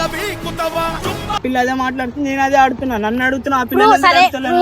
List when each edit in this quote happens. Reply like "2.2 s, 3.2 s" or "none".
1.4 s